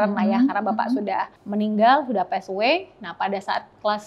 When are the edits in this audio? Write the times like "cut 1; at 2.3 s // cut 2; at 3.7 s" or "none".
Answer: cut 1; at 1.4 s